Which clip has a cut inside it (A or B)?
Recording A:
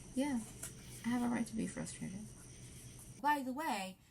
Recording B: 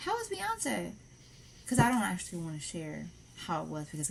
A